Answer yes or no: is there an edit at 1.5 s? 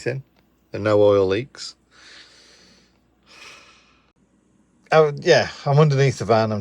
no